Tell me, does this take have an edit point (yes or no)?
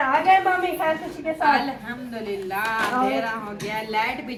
no